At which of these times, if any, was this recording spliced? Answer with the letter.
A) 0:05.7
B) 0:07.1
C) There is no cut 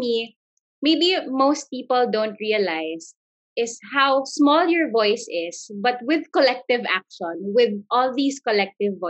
C